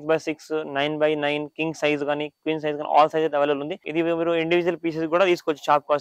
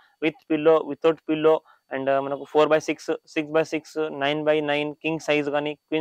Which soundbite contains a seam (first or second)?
first